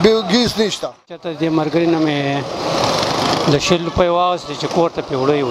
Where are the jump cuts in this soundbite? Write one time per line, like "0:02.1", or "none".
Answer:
0:01.3

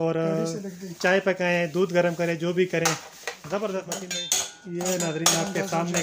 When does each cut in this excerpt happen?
0:04.0

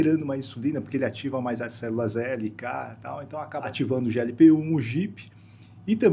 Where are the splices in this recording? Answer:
0:03.6

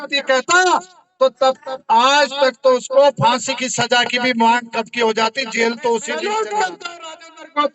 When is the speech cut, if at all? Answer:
0:06.2

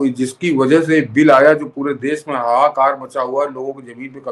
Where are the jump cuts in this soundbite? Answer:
none

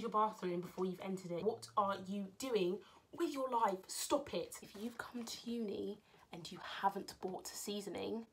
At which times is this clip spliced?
0:01.4
0:04.6

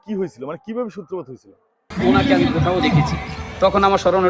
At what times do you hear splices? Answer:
0:01.8

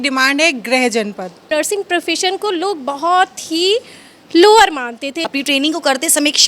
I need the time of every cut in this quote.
0:01.5
0:05.2

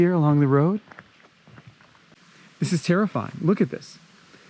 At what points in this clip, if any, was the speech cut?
0:02.1

